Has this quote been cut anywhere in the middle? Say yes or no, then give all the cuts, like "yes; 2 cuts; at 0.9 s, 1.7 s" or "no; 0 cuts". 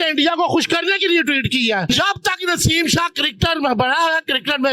yes; 1 cut; at 1.9 s